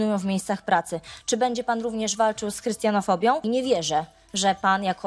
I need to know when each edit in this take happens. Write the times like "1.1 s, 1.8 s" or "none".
3.4 s